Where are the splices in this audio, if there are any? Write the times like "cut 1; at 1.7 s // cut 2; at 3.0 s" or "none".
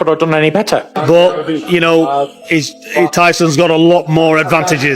cut 1; at 0.9 s